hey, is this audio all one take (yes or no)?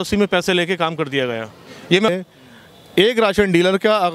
no